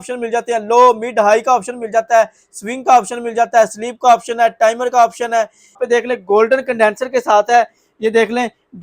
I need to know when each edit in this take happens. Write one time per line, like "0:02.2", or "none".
0:05.8